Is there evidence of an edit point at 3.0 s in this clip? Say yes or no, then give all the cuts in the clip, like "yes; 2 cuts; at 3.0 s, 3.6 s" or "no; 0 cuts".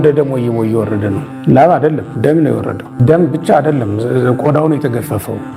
yes; 1 cut; at 3.0 s